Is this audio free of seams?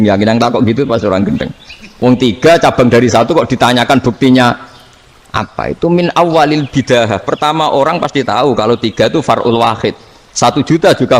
yes; 0 cuts

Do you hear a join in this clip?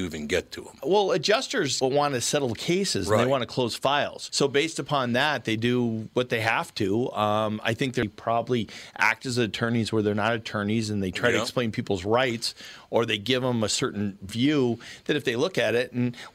yes; 1 cut; at 8.0 s

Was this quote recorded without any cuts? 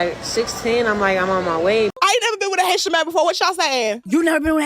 no; 1 cut; at 1.9 s

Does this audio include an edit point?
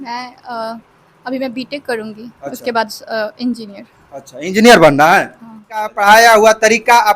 yes; 1 cut; at 5.9 s

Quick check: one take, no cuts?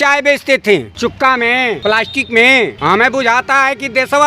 no; 3 cuts; at 0.9 s, 1.8 s, 2.8 s

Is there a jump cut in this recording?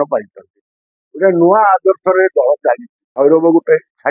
yes; 1 cut; at 3.0 s

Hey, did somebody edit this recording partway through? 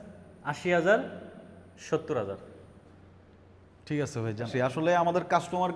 yes; 1 cut; at 4.6 s

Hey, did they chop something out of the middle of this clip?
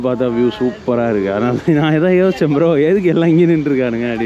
no; 0 cuts

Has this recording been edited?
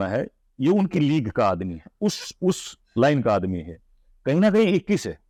no; 0 cuts

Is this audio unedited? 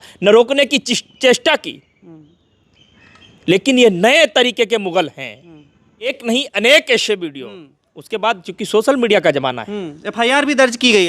no; 1 cut; at 6.1 s

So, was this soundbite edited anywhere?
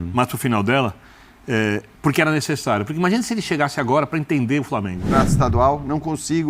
yes; 1 cut; at 5.3 s

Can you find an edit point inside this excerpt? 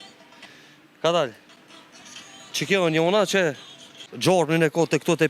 yes; 1 cut; at 4.1 s

